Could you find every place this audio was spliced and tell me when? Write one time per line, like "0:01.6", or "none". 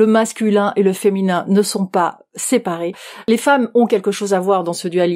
0:03.1

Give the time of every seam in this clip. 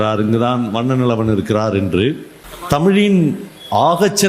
0:02.8

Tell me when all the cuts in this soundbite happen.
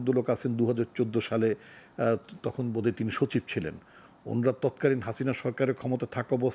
none

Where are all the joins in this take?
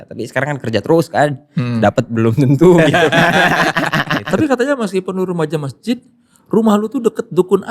0:04.2

